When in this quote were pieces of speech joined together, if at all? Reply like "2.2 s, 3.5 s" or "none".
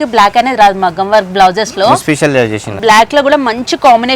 2.8 s